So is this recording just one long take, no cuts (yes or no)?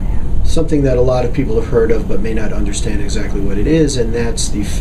yes